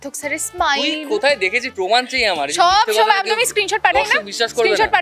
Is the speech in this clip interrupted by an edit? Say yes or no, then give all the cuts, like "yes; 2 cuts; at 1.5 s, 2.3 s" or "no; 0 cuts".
no; 0 cuts